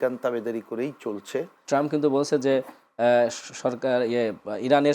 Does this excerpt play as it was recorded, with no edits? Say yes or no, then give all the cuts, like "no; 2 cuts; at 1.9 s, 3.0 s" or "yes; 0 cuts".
no; 1 cut; at 1.6 s